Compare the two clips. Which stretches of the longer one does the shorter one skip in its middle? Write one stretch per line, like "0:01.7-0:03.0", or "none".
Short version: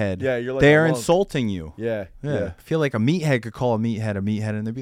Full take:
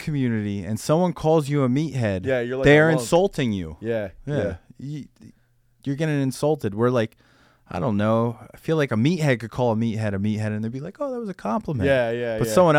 0:04.6-0:08.5